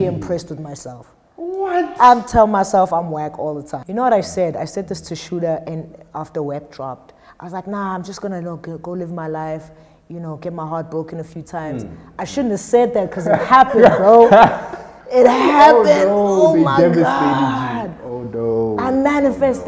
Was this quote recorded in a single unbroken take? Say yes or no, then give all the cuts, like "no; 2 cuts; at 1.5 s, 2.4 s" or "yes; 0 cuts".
no; 1 cut; at 3.8 s